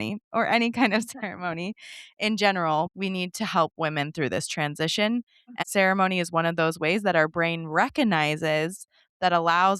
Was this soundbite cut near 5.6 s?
yes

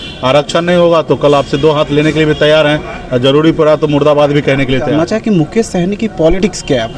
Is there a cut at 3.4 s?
no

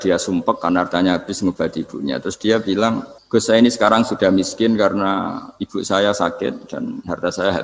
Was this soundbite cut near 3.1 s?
yes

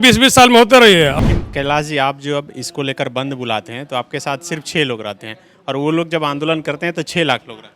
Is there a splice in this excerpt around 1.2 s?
yes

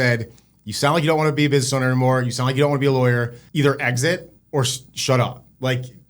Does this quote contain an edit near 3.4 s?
yes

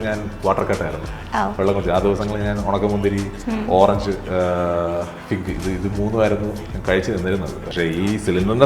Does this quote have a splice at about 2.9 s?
no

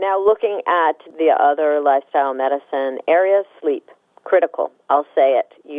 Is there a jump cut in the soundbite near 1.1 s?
yes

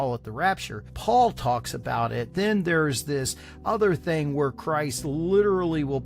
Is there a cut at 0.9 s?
yes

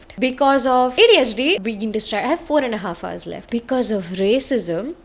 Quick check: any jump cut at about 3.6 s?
no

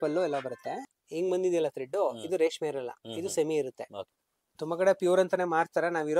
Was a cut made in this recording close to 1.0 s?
yes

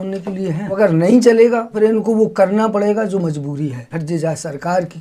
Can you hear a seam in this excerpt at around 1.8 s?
yes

